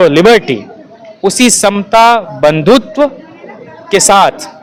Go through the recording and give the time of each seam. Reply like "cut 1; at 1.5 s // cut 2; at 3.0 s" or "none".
none